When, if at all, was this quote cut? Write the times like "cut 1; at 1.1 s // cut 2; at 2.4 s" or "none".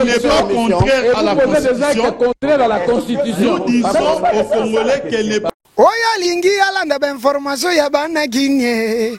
cut 1; at 5.5 s